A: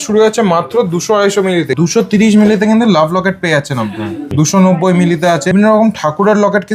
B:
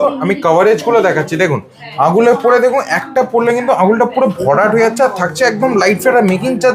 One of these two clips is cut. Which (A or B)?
A